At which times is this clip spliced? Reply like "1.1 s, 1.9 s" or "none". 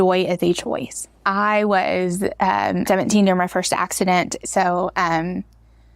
1.2 s, 2.8 s, 4.4 s